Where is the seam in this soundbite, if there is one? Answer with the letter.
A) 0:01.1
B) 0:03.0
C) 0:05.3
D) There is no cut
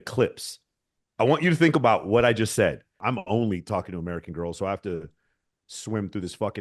B